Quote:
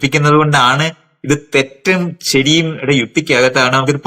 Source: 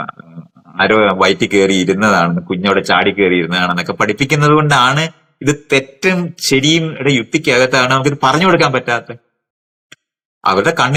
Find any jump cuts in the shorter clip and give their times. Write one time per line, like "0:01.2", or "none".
none